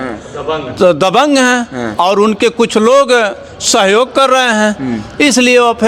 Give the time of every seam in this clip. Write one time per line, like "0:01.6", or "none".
none